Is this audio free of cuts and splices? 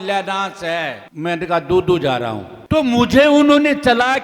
no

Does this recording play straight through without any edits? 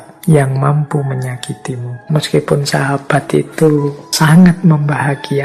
no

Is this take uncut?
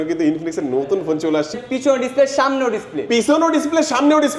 no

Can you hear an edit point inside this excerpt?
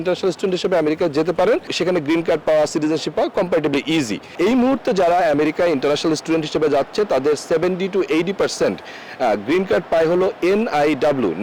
yes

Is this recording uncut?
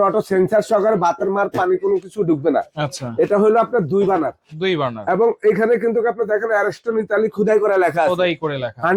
yes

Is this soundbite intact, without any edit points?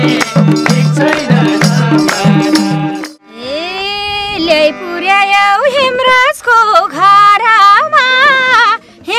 no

